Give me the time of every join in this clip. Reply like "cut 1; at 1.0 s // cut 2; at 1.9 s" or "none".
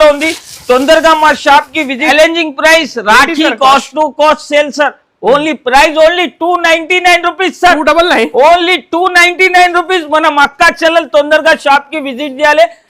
cut 1; at 2.1 s